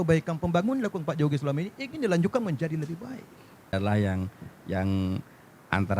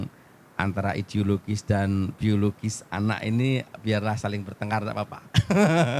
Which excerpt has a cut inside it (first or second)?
first